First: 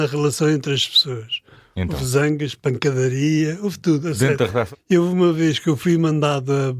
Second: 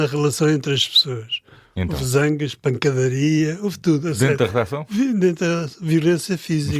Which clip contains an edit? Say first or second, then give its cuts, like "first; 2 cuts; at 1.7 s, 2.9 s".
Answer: first; 1 cut; at 4.8 s